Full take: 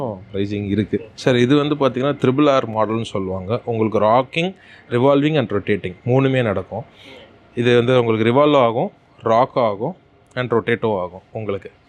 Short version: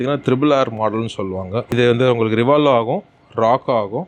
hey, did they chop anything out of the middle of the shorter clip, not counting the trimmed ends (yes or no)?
yes